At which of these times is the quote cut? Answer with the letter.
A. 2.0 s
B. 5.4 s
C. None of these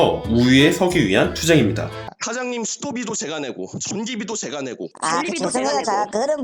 A